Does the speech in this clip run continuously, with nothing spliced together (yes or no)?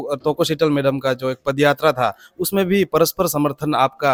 yes